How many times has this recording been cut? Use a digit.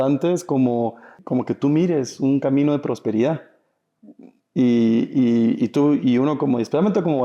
1